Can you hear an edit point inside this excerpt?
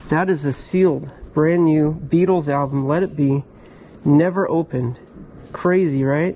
no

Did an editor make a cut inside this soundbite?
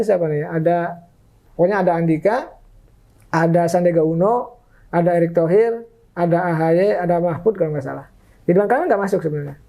yes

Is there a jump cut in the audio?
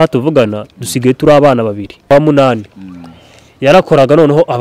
yes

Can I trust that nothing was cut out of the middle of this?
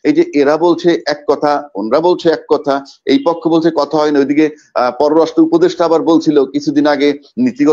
yes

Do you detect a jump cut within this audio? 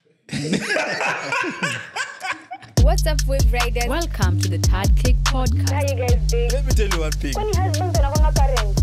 yes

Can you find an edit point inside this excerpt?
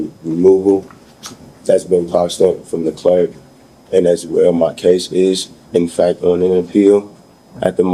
no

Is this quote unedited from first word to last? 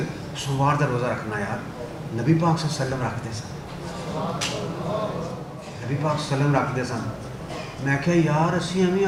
yes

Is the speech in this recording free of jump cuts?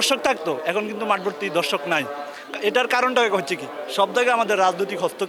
yes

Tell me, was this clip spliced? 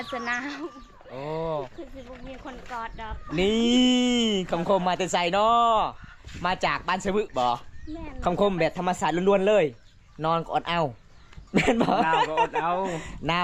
no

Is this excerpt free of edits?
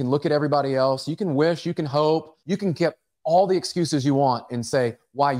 no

